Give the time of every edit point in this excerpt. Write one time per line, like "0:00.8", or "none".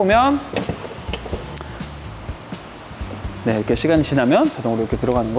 none